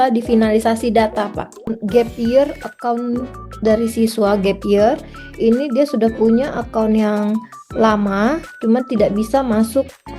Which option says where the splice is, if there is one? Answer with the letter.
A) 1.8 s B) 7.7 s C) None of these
A